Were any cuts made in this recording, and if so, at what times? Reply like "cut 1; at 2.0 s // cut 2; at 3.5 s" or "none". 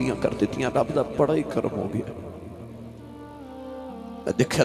cut 1; at 2.2 s // cut 2; at 3.9 s